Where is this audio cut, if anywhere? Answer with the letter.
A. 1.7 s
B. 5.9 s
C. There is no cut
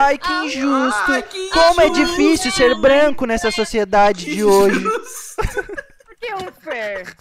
C